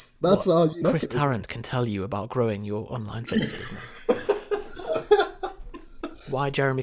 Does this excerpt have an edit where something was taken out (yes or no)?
no